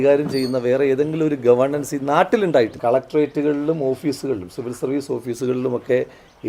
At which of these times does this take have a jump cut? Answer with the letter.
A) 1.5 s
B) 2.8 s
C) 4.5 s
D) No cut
B